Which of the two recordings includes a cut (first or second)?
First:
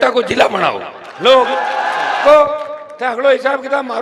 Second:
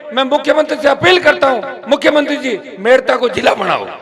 first